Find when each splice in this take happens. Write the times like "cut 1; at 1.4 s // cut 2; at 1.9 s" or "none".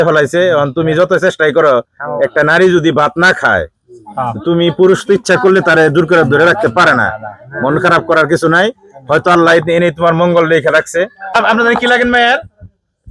cut 1; at 11.3 s